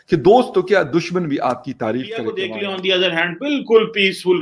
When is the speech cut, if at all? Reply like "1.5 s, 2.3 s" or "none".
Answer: 2.5 s